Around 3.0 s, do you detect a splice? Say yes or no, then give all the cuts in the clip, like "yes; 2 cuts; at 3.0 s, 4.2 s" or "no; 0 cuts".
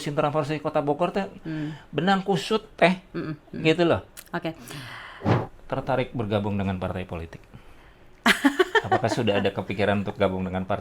no; 1 cut; at 5.3 s